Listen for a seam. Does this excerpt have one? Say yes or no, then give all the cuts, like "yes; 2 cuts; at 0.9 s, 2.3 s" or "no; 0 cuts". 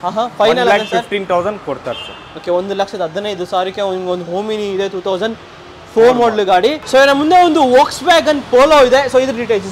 no; 0 cuts